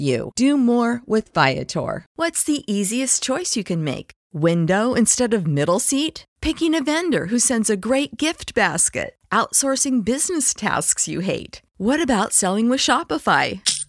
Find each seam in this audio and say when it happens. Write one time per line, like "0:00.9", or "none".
0:02.1